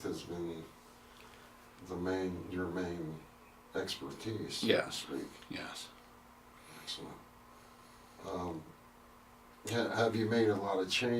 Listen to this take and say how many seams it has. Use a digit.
1